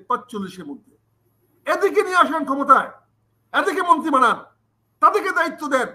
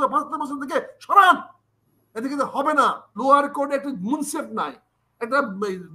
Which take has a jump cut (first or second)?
second